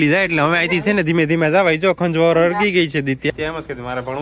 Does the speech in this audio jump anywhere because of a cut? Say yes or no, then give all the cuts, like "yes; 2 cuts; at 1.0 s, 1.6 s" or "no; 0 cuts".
yes; 1 cut; at 3.3 s